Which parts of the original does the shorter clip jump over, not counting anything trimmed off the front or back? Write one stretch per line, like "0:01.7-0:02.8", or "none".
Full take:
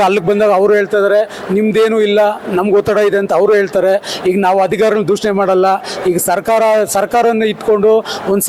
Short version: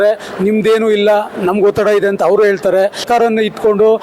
0:04.1-0:07.1